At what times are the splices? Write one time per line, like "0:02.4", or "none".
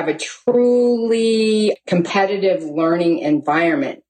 0:01.8